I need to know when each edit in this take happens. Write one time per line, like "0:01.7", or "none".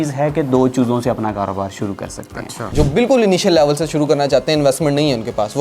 0:02.7